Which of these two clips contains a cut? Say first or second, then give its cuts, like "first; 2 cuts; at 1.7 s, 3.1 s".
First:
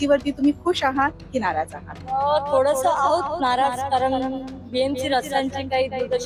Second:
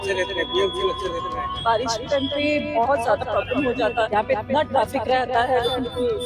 second; 2 cuts; at 1.5 s, 4.1 s